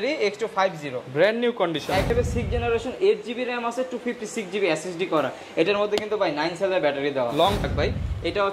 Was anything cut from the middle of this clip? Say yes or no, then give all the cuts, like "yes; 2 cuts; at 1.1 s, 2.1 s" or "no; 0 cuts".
yes; 2 cuts; at 2.1 s, 7.6 s